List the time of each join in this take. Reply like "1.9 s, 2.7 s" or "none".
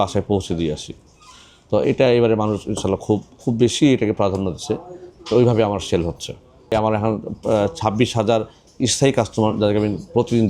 6.7 s